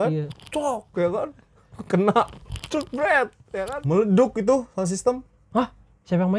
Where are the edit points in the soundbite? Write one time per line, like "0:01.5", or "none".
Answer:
0:03.4